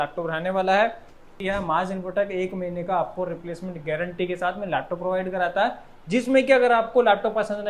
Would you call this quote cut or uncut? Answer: cut